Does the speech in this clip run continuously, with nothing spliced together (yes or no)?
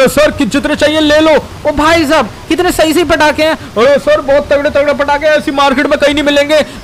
yes